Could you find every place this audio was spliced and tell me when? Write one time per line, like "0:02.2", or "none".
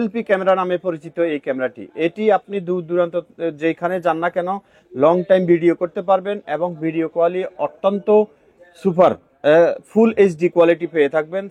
none